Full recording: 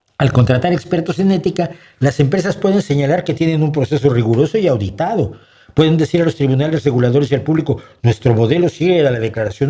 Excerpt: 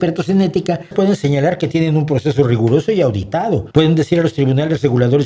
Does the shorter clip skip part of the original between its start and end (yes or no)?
yes